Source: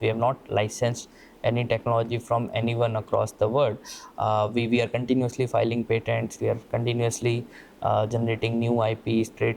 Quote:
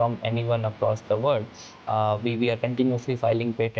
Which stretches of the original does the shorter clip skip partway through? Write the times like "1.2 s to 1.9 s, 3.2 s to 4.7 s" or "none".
none

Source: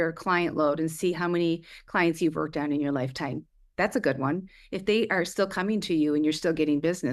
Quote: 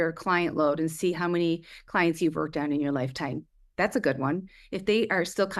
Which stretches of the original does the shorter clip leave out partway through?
none

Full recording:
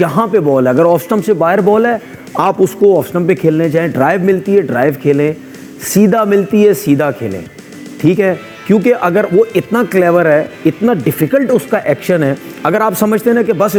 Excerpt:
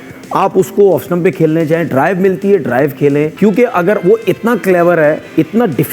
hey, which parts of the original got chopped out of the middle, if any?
5.4 s to 8.6 s

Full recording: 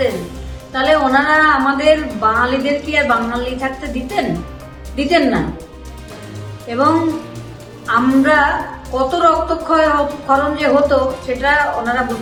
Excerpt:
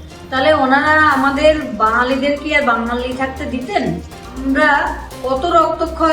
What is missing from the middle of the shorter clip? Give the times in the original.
4.8 s to 8.1 s

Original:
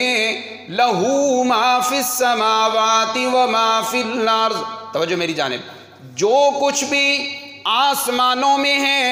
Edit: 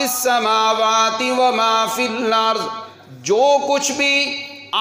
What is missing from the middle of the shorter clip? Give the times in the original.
4.8 s to 5.7 s

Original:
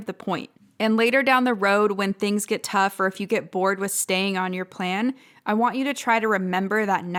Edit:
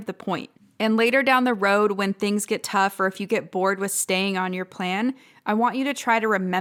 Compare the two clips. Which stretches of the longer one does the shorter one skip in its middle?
none

